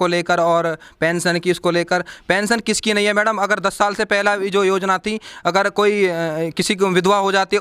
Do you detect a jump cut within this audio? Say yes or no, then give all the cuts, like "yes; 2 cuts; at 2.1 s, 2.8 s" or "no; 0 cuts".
no; 0 cuts